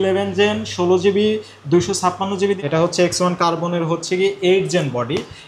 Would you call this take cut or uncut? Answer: cut